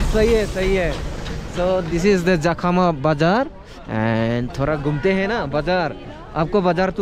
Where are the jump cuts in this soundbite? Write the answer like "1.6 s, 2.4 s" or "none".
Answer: none

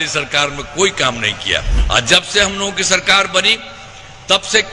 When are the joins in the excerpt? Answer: 1.7 s

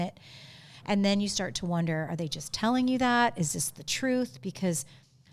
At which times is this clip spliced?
none

